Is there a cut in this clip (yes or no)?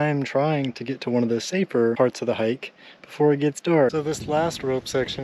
yes